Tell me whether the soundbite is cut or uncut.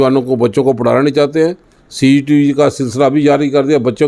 uncut